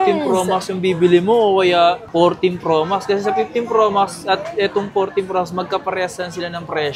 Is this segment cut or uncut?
uncut